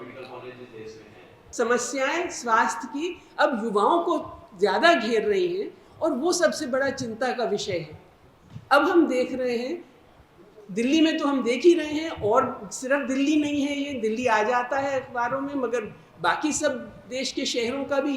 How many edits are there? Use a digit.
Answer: 1